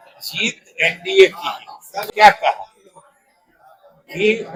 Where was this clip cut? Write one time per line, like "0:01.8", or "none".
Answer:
none